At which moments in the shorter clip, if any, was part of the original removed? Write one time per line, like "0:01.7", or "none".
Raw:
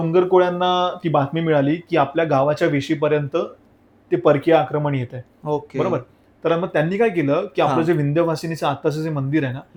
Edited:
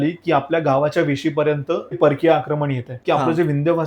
0:02.0
0:03.0